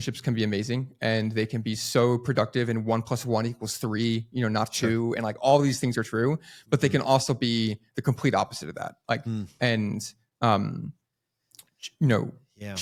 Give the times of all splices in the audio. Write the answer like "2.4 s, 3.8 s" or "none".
none